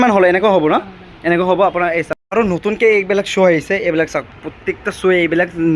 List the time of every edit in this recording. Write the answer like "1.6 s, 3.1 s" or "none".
2.2 s